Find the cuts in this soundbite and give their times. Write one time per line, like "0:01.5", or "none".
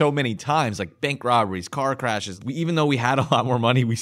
0:02.3